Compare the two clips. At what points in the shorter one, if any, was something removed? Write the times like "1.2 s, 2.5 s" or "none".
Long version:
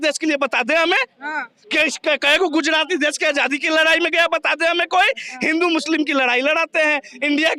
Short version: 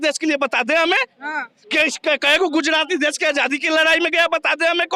none